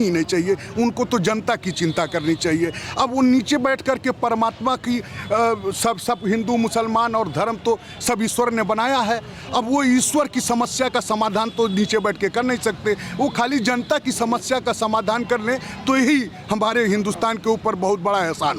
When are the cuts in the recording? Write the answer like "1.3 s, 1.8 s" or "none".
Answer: none